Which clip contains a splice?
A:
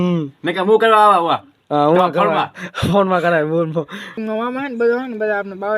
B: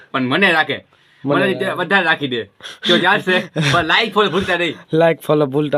A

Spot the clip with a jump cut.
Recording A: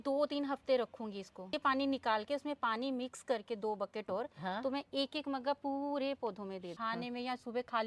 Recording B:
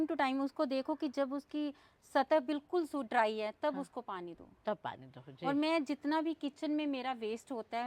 A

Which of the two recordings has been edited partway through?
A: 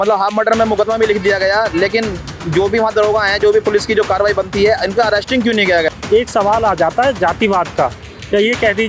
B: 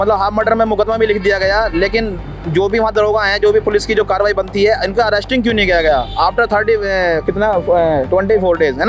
A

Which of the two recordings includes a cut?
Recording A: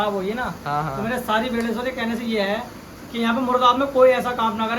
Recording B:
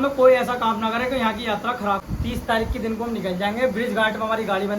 B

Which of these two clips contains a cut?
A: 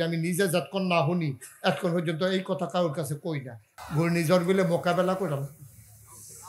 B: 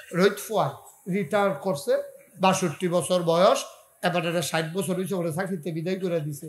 A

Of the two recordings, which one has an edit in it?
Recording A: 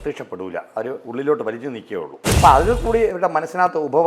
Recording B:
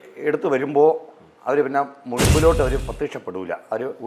A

